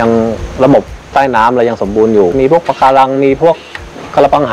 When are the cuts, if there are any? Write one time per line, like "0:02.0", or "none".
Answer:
0:01.0
0:02.3